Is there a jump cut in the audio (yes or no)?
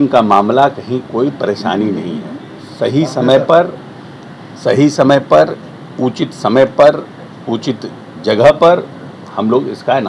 no